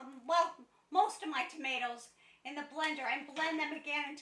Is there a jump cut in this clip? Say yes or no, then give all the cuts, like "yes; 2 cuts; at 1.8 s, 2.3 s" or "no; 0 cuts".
no; 0 cuts